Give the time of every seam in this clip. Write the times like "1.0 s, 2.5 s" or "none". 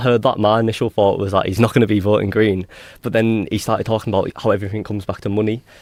none